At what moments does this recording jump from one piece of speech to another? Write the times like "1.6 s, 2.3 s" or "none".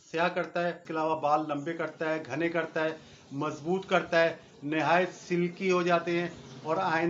0.9 s